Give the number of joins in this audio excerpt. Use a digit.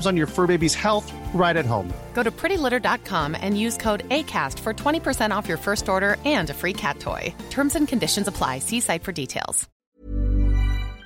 1